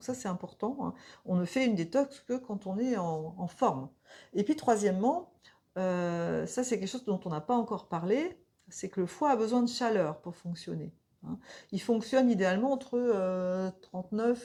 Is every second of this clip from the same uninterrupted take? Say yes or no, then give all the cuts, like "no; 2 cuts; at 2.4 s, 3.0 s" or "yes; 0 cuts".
yes; 0 cuts